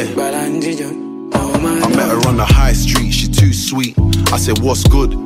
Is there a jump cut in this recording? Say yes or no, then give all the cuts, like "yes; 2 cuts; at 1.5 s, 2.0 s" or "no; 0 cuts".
no; 0 cuts